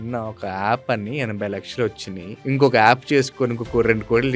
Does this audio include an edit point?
yes; 1 cut; at 2.4 s

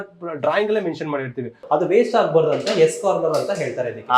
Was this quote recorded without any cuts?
no; 1 cut; at 1.6 s

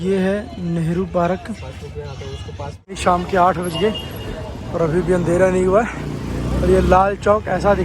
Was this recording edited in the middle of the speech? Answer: yes; 1 cut; at 3.0 s

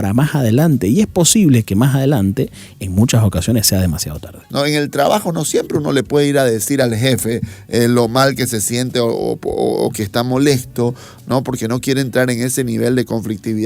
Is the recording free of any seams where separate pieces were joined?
no; 1 cut; at 4.4 s

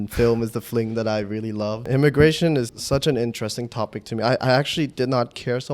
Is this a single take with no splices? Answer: no; 2 cuts; at 1.8 s, 2.7 s

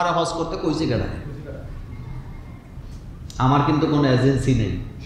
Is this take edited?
no; 0 cuts

